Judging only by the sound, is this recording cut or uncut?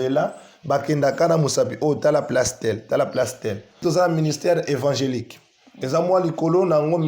cut